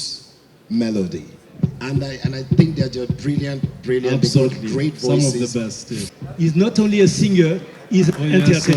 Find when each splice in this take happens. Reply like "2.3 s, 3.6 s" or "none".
5.9 s